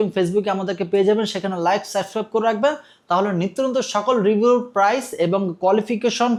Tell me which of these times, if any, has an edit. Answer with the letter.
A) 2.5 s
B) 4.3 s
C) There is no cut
C